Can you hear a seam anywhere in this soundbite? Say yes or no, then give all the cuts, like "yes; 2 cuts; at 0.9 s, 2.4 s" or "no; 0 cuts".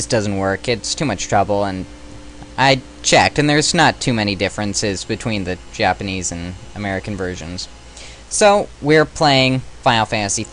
no; 0 cuts